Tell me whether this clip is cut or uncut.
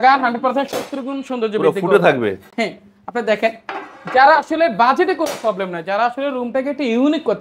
uncut